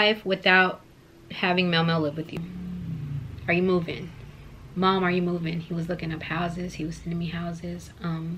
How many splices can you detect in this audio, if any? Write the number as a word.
one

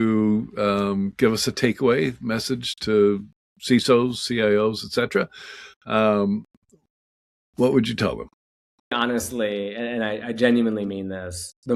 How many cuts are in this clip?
one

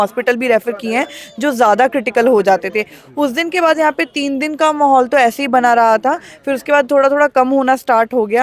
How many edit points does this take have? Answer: zero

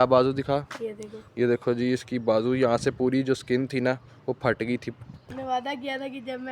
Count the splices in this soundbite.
one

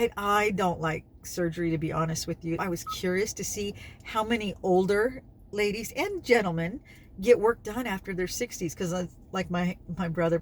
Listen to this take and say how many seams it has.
one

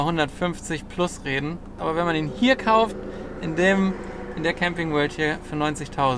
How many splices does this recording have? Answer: one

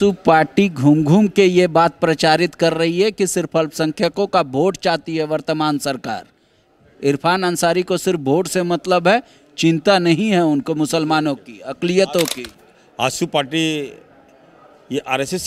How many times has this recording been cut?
zero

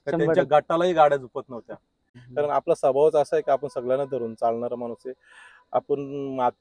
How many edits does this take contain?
one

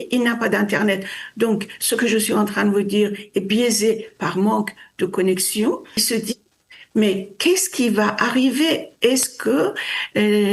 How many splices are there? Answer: one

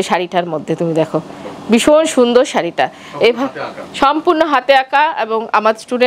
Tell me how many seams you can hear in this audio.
zero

